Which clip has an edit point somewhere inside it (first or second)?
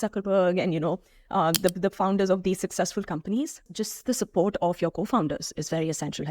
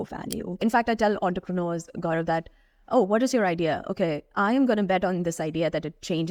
first